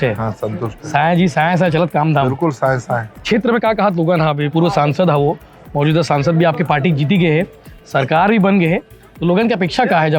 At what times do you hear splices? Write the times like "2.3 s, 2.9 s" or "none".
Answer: 3.2 s, 4.5 s